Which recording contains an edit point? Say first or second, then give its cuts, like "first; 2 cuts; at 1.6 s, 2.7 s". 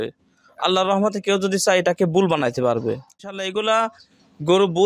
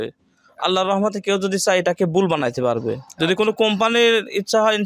first; 1 cut; at 3.1 s